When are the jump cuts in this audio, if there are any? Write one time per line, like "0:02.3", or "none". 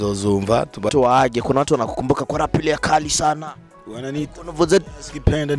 0:00.9